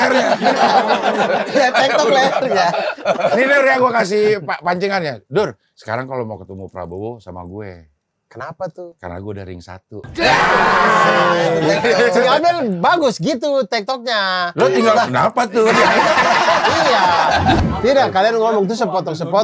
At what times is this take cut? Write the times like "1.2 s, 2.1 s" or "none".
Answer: 17.6 s